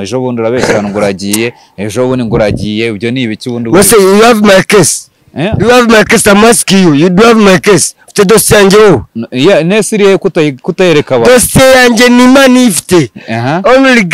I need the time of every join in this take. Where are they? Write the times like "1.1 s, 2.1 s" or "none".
none